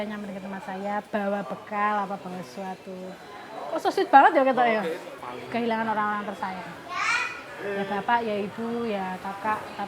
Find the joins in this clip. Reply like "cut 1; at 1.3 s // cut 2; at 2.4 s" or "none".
cut 1; at 5.1 s